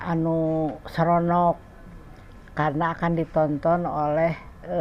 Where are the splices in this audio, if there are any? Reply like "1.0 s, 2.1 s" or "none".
none